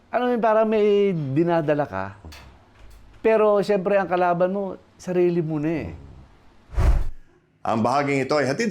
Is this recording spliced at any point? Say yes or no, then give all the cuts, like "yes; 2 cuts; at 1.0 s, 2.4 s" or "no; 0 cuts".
yes; 1 cut; at 6.7 s